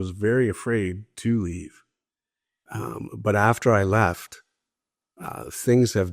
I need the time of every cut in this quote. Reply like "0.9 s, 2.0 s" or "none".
none